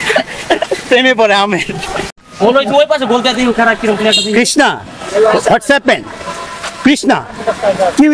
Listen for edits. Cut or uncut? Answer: cut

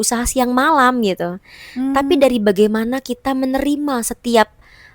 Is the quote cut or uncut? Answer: uncut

